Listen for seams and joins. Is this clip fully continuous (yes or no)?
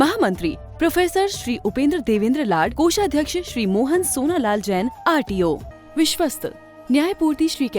no